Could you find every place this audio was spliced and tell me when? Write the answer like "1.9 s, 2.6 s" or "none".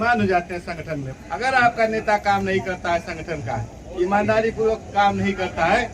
1.0 s